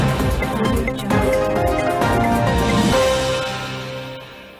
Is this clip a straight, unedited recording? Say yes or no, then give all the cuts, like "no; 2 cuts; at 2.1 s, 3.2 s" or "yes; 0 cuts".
yes; 0 cuts